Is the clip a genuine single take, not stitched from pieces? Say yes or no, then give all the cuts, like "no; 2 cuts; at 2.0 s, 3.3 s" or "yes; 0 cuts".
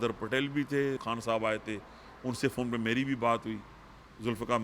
no; 1 cut; at 1.0 s